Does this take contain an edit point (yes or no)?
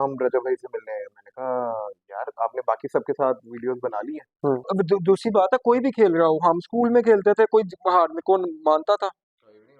yes